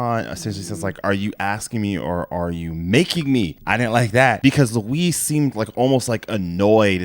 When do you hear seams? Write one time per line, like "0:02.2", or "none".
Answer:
0:04.4

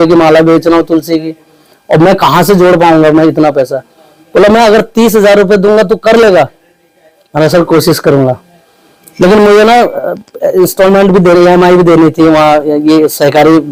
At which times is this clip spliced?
none

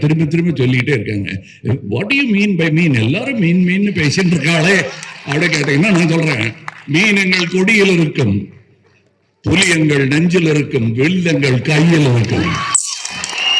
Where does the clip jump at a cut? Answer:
none

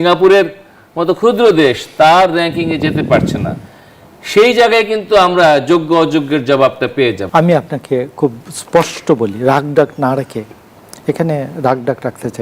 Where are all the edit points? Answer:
0:07.2

